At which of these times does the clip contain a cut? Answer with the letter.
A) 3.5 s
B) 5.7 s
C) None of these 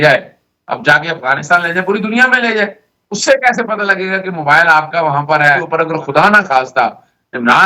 B